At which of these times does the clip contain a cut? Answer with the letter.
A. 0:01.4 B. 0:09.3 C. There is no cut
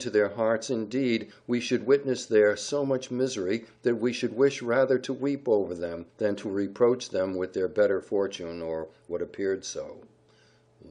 A